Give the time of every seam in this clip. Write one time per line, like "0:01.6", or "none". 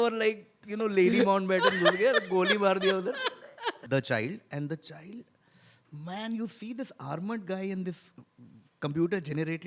0:03.8